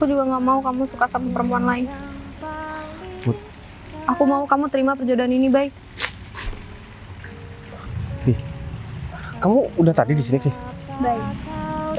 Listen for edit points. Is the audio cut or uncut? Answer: cut